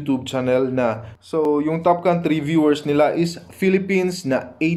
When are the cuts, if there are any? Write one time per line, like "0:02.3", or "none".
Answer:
0:01.5